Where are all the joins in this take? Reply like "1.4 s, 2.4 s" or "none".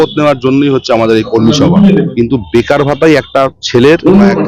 2.1 s